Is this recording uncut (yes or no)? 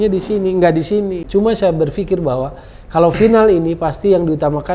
no